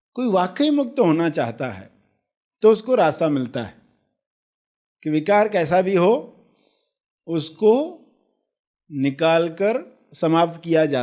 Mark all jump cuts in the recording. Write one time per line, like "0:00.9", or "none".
none